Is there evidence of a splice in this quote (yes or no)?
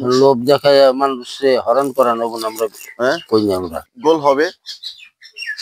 yes